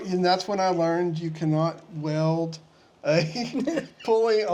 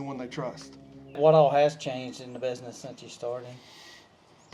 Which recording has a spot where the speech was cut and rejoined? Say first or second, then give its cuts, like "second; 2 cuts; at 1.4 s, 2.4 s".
second; 1 cut; at 1.2 s